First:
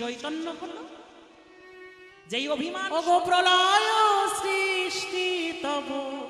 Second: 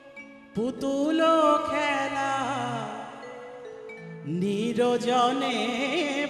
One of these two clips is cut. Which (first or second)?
first